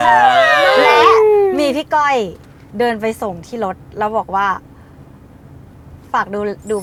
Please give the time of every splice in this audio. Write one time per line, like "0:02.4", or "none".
none